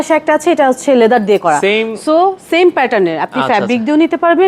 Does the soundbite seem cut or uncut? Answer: uncut